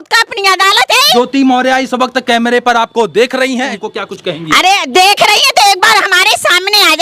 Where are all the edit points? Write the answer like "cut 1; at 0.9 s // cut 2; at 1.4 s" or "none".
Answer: cut 1; at 1.1 s // cut 2; at 3.7 s